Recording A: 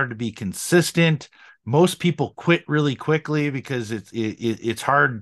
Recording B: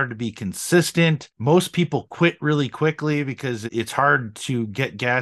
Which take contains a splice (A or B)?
B